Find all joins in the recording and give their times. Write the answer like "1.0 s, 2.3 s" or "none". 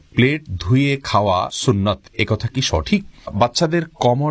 1.5 s, 3.3 s

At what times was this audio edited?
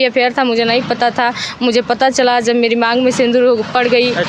none

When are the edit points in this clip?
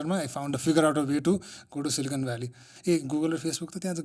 2.8 s

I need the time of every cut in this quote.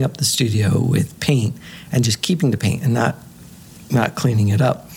none

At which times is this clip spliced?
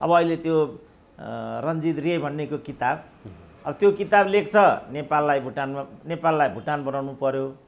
none

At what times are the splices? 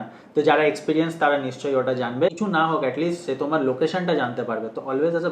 2.3 s

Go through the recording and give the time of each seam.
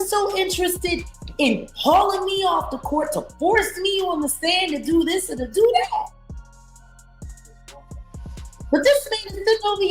6.8 s, 8.7 s

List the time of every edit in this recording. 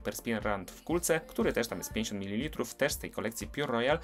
1.3 s

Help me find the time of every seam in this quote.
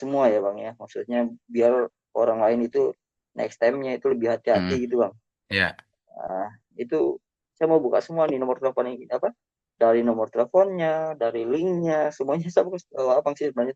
none

